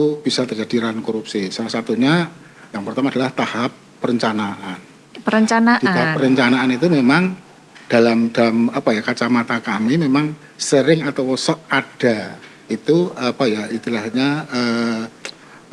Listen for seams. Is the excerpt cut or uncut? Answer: uncut